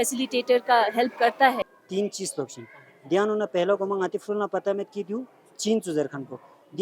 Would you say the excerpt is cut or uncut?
cut